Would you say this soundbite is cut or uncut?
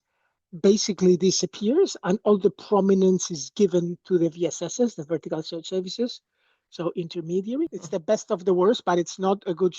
cut